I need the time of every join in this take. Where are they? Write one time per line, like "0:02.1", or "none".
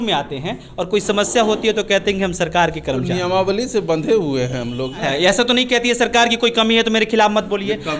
0:05.1